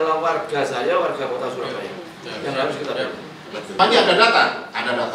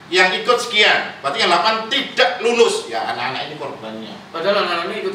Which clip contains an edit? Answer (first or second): first